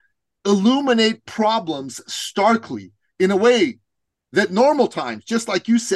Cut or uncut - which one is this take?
uncut